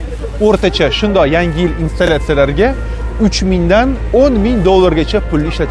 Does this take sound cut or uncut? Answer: uncut